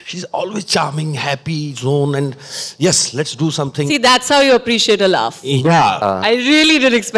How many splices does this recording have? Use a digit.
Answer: 1